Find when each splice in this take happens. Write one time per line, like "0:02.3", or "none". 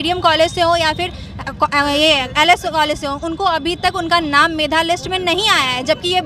none